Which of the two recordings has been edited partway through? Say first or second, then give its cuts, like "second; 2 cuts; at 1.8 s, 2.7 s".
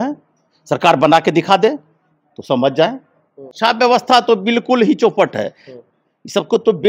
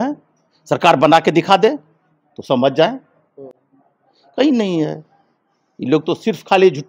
first; 1 cut; at 3.5 s